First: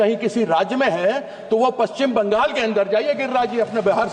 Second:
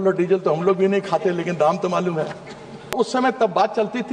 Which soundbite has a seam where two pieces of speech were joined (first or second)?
second